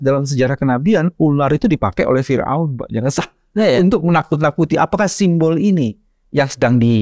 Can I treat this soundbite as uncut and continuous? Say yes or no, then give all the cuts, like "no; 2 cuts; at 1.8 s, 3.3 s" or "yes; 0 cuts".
yes; 0 cuts